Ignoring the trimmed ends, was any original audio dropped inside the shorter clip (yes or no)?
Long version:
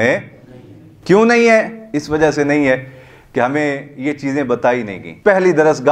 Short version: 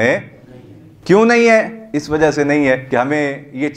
yes